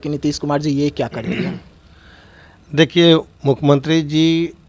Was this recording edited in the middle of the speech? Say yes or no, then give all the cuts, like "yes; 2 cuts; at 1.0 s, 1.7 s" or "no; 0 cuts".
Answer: no; 0 cuts